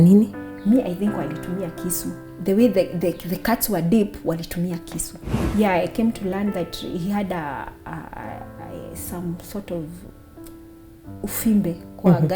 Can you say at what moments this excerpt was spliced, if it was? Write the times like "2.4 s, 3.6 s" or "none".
5.4 s